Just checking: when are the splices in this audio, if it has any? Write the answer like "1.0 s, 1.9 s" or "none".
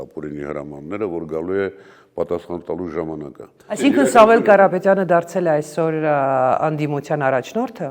3.8 s